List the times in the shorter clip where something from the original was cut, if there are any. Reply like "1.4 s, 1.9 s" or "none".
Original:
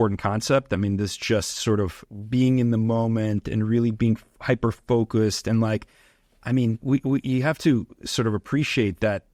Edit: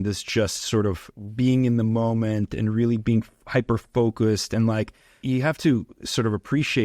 5.2 s